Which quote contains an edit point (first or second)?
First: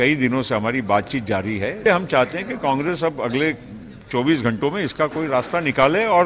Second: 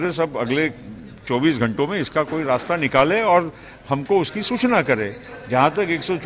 first